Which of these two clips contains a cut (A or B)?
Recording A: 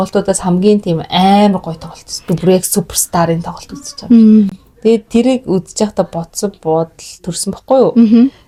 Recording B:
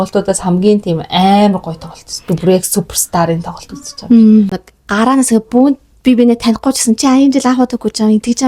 B